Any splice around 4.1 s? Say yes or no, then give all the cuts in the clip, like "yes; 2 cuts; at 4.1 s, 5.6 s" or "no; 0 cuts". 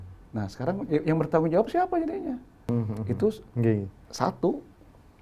no; 1 cut; at 2.6 s